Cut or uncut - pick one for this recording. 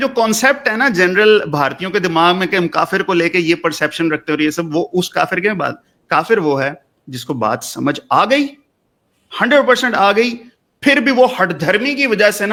uncut